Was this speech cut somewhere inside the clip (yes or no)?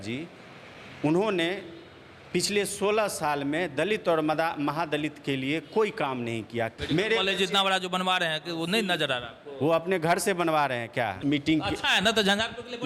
yes